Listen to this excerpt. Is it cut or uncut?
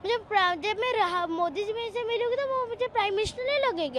uncut